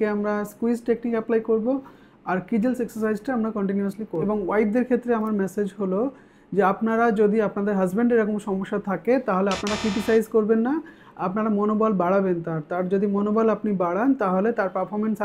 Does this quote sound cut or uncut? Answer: cut